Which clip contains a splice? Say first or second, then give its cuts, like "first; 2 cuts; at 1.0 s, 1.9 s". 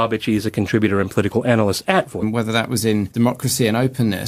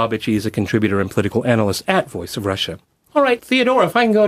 second; 1 cut; at 2.2 s